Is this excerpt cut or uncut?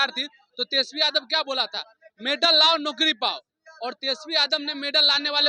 uncut